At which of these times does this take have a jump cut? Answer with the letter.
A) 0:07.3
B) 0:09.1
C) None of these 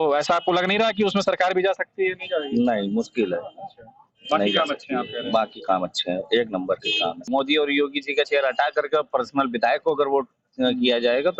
A